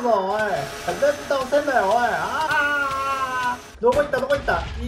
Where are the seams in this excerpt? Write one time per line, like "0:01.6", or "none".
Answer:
0:00.9
0:02.5
0:03.7